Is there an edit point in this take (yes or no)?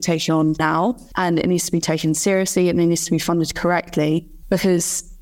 no